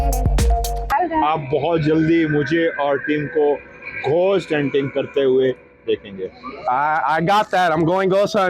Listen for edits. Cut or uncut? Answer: cut